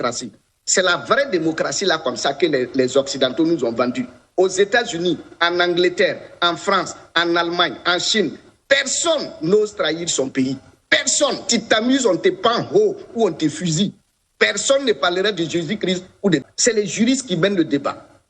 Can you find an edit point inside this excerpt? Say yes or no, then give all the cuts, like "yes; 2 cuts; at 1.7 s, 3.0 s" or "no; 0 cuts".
yes; 1 cut; at 16.4 s